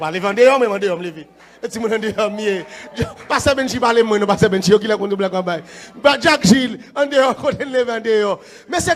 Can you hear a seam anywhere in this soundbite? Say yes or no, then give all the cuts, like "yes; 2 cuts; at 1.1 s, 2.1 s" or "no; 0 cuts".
no; 0 cuts